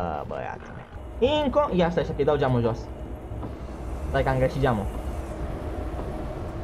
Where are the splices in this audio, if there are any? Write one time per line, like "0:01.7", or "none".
0:01.0